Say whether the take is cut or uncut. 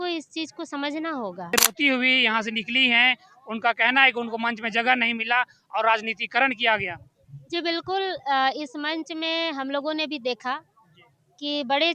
cut